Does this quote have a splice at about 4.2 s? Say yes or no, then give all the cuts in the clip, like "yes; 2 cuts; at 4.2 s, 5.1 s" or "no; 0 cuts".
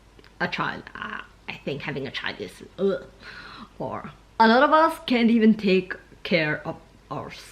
yes; 1 cut; at 4.2 s